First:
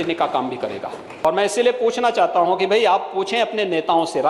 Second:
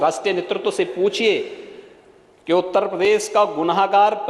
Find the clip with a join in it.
first; 1 cut; at 1.1 s

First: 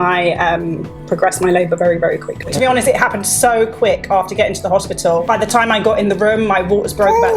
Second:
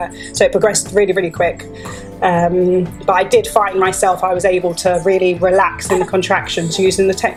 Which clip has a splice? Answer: first; 2 cuts; at 2.5 s, 5.2 s

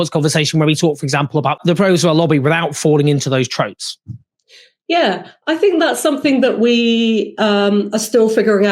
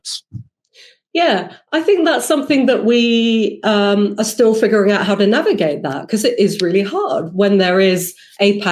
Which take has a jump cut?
first; 1 cut; at 1.6 s

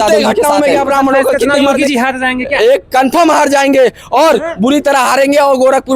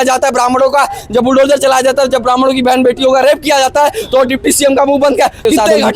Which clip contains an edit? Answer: first; 1 cut; at 1.4 s

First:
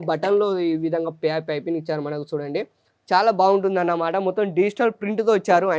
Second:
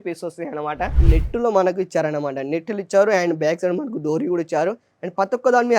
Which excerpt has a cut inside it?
second; 1 cut; at 1.0 s

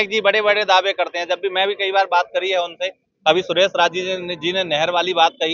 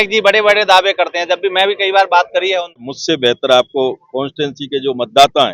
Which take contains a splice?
second; 1 cut; at 2.9 s

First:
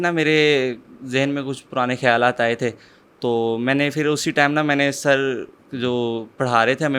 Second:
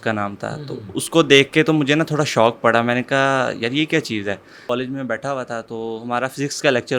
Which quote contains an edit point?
second; 1 cut; at 4.5 s

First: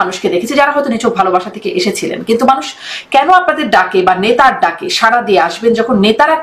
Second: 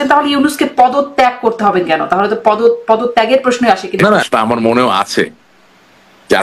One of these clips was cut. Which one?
second; 1 cut; at 4.3 s

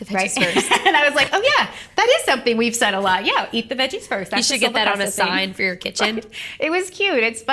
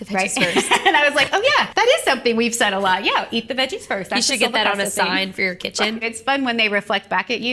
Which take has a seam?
second; 2 cuts; at 1.7 s, 6.1 s

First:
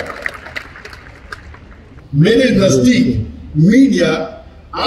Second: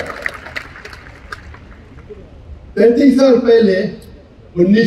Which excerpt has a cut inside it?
first; 1 cut; at 2.0 s

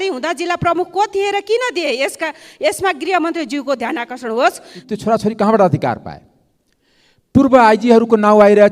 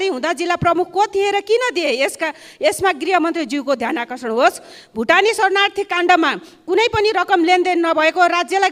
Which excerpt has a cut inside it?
first; 1 cut; at 4.8 s

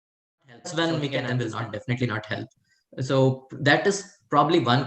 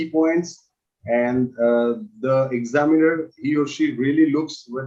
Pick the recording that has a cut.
first; 1 cut; at 1.3 s

